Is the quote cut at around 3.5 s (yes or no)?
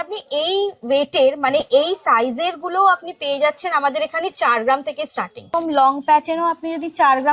no